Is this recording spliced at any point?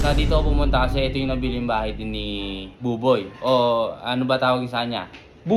no; 0 cuts

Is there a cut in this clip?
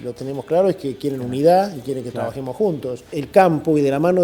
yes; 1 cut; at 3.2 s

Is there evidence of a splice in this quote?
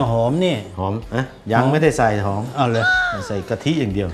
yes; 1 cut; at 1.0 s

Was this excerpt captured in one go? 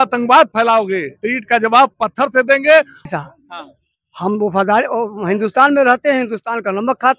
no; 1 cut; at 3.1 s

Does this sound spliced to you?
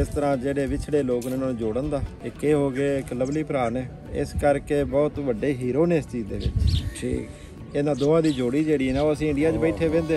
yes; 3 cuts; at 2.2 s, 4.1 s, 7.5 s

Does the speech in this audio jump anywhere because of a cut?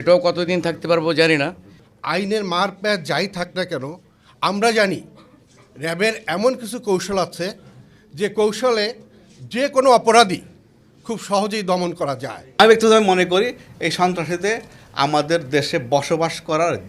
yes; 1 cut; at 15.1 s

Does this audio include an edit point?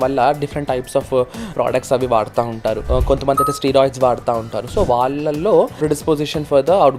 yes; 3 cuts; at 1.5 s, 2.8 s, 5.7 s

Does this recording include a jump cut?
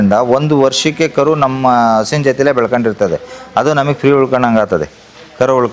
no; 0 cuts

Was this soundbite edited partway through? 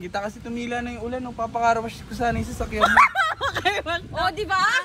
no; 0 cuts

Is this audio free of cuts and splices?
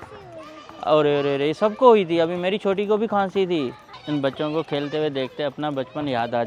no; 1 cut; at 4.0 s

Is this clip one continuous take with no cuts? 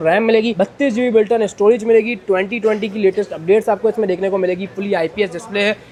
yes; 0 cuts

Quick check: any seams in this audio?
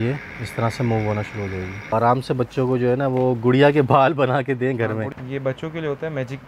yes; 2 cuts; at 1.9 s, 5.1 s

